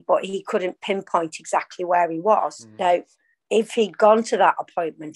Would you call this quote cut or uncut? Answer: cut